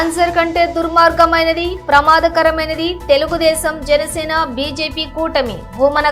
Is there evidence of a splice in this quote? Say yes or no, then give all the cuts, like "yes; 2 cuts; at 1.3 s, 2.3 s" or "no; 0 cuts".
no; 0 cuts